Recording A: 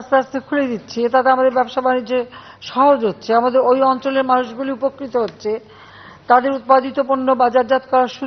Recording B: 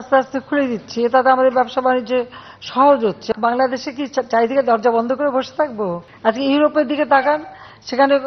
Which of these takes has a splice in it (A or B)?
B